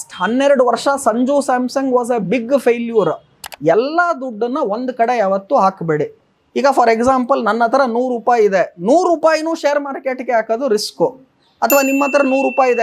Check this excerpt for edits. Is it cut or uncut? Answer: cut